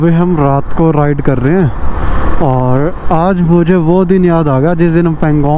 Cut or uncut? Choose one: uncut